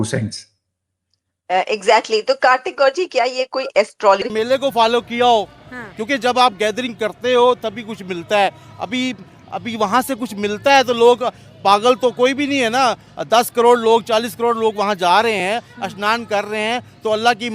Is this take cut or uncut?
cut